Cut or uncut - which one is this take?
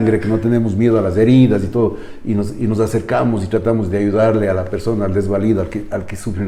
uncut